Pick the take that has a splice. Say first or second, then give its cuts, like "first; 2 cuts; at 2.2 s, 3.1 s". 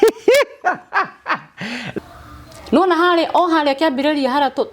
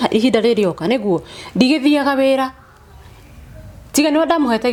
first; 1 cut; at 2.0 s